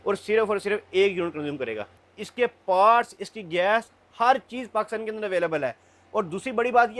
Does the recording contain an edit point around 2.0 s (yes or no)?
yes